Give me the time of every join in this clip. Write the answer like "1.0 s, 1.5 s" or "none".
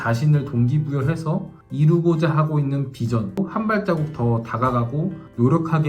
1.6 s, 3.4 s